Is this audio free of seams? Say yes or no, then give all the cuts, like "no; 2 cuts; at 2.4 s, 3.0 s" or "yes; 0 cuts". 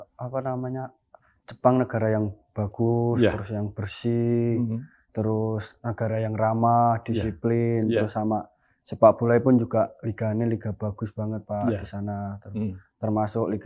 yes; 0 cuts